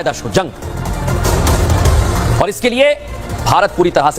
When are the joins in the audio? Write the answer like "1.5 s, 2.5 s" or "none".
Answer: none